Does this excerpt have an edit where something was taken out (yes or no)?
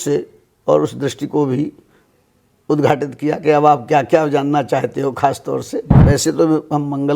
yes